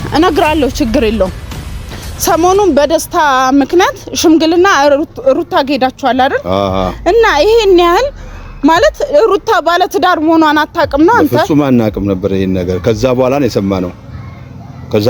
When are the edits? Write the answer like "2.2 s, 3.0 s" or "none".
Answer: none